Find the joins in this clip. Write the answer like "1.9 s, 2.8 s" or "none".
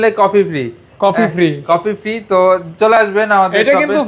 none